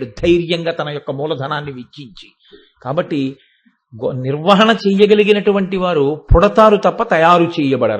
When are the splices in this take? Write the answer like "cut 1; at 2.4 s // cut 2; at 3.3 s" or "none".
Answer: none